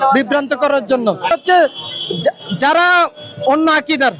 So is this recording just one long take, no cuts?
no; 1 cut; at 1.3 s

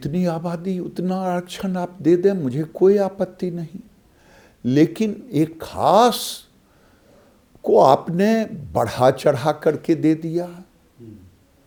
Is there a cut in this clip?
no; 0 cuts

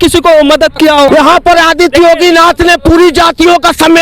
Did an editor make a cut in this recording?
yes; 1 cut; at 1.1 s

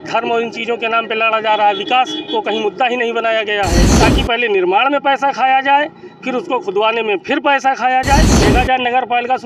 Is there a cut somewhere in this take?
yes; 2 cuts; at 3.9 s, 8.3 s

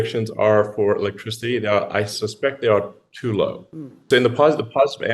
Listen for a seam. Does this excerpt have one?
yes; 1 cut; at 4.0 s

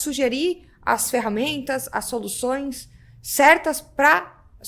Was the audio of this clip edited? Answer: no; 0 cuts

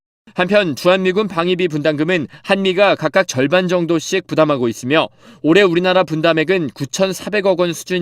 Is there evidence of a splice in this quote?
yes; 1 cut; at 4.0 s

